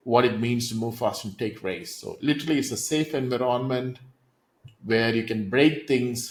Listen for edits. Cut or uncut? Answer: uncut